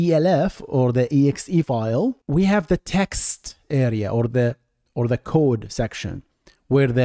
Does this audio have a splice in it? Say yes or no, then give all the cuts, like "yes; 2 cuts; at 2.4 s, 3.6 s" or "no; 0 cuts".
no; 0 cuts